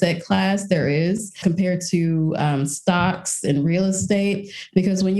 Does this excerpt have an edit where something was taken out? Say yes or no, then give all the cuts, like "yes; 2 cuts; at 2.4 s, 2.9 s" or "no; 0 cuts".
yes; 1 cut; at 1.4 s